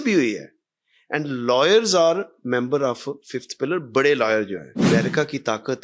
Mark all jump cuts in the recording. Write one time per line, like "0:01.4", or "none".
0:04.9